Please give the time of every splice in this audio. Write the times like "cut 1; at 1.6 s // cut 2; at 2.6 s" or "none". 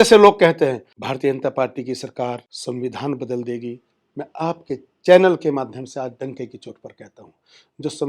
cut 1; at 0.9 s // cut 2; at 2.5 s